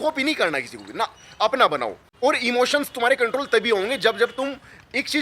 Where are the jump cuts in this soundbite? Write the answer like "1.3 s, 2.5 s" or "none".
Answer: none